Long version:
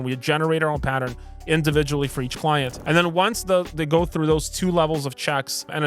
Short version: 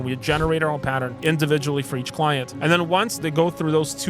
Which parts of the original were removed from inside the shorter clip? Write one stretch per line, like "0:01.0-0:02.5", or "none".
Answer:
0:01.1-0:01.4
0:03.4-0:03.7